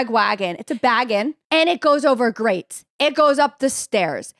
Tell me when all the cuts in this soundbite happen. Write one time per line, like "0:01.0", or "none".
0:01.3